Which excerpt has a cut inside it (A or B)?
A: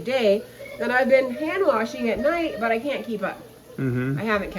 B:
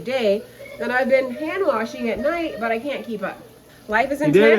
B